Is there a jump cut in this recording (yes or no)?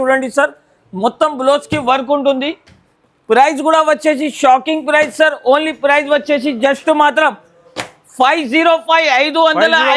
no